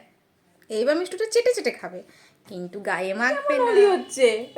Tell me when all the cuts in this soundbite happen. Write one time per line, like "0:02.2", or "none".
0:03.4